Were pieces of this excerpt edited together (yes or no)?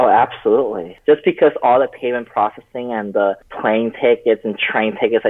yes